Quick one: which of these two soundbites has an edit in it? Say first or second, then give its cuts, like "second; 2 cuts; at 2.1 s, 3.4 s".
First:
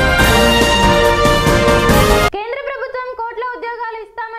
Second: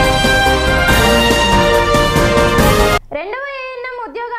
first; 1 cut; at 2.3 s